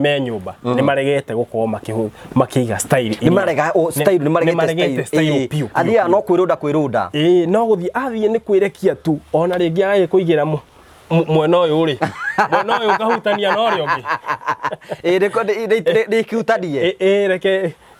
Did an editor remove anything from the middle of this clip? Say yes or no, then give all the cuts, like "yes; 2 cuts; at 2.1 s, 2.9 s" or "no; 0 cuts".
no; 0 cuts